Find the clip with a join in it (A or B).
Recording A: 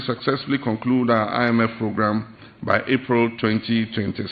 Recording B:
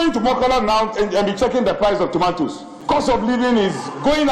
B